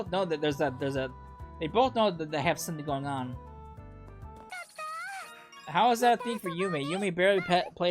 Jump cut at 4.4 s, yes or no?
yes